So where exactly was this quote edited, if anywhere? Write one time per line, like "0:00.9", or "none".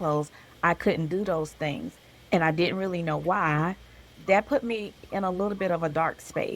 0:04.0